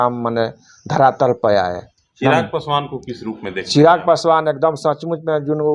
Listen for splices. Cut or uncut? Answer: uncut